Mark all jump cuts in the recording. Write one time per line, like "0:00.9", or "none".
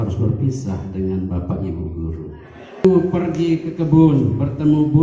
0:02.8

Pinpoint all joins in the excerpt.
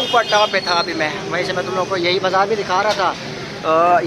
none

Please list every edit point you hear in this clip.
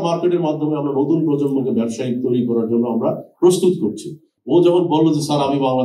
0:04.3

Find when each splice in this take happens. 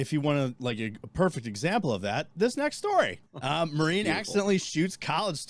0:03.3

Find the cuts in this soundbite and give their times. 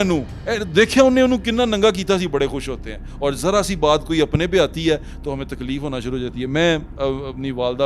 none

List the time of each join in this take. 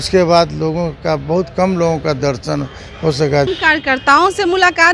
0:03.5

